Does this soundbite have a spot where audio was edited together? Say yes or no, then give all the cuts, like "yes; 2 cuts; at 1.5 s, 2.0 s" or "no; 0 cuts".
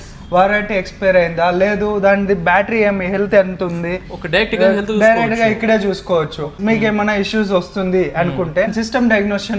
yes; 2 cuts; at 6.5 s, 8.8 s